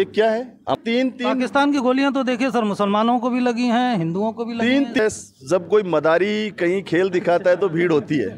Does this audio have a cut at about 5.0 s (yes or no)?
yes